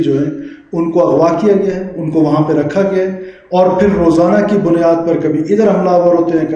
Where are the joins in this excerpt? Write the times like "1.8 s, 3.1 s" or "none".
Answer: none